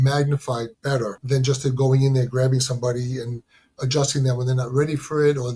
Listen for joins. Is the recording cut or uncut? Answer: cut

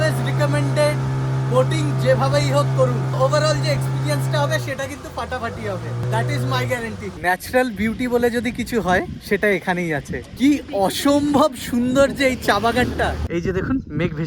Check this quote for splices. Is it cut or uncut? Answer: cut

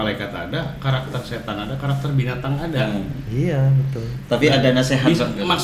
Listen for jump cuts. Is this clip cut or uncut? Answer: uncut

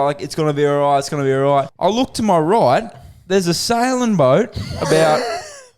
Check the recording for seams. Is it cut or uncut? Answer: cut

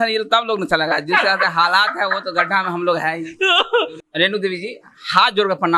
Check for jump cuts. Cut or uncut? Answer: cut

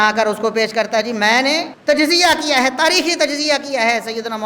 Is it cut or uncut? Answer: cut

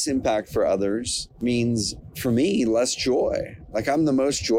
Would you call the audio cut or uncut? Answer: cut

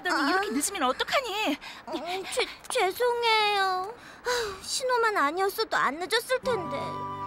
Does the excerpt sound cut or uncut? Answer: uncut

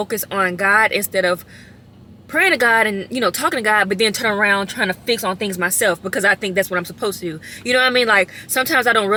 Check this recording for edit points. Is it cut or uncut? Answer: uncut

